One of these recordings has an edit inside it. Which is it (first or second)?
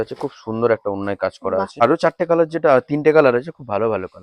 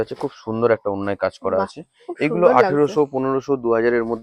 first